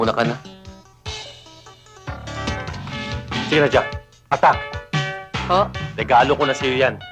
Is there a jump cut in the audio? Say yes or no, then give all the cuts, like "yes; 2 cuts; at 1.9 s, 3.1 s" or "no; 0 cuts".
yes; 2 cuts; at 3.1 s, 5.9 s